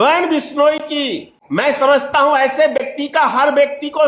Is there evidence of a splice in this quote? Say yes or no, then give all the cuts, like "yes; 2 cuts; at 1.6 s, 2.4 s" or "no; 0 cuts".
yes; 1 cut; at 1.3 s